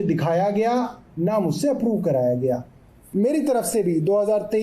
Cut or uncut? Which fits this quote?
cut